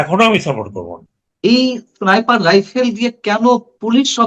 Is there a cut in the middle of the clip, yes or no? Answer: yes